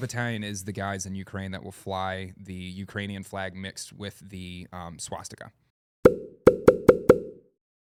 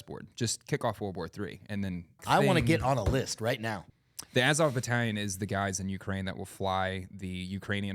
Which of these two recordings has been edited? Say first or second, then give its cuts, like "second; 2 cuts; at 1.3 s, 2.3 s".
second; 2 cuts; at 2.2 s, 3.8 s